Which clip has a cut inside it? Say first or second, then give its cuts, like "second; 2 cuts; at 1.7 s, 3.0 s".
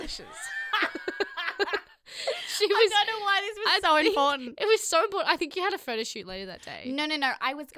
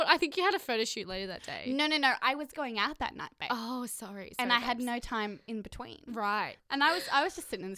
second; 1 cut; at 6.6 s